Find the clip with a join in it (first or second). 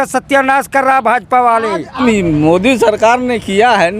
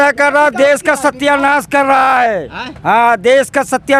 first